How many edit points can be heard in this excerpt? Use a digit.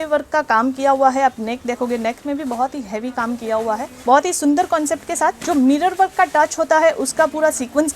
1